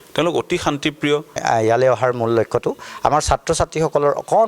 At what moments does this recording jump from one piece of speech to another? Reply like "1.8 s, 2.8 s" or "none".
1.4 s

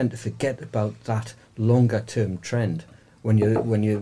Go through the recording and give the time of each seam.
none

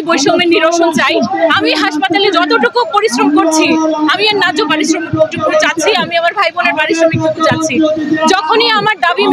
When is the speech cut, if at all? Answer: none

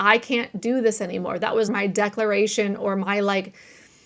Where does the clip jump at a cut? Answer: 1.7 s

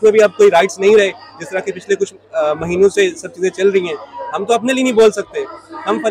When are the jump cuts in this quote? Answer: none

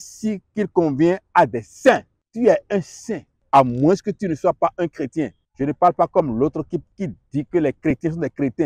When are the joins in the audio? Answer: 2.2 s, 3.3 s, 5.4 s, 6.9 s

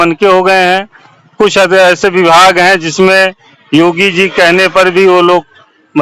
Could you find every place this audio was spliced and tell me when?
none

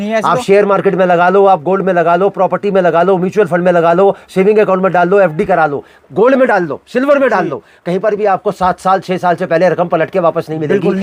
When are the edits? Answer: none

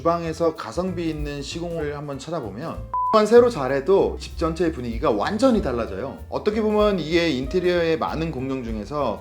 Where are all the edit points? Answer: 3.1 s

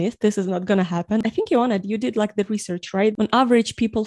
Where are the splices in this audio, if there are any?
1.2 s, 3.1 s

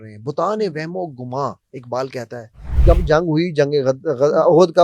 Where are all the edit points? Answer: 2.7 s

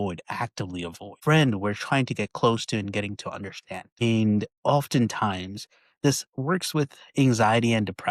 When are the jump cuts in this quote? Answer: 1.1 s

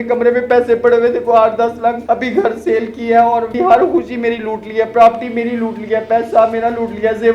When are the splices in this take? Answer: 2.0 s, 3.5 s

